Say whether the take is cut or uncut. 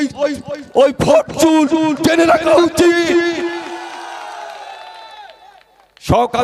uncut